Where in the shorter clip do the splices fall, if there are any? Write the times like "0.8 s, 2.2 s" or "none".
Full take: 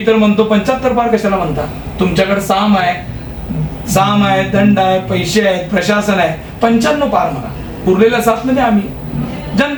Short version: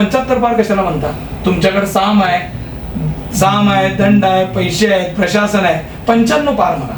none